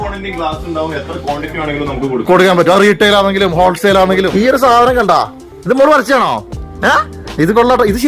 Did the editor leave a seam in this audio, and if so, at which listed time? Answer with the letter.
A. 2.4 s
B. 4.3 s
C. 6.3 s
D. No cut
B